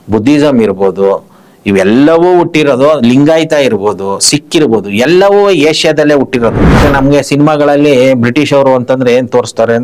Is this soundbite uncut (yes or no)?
no